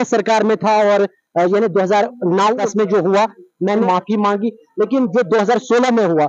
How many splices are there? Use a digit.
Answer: 2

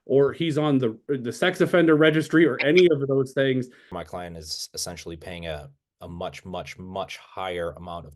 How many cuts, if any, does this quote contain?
1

